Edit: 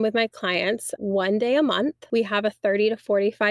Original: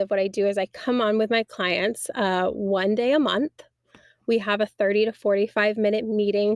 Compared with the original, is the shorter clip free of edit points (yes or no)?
no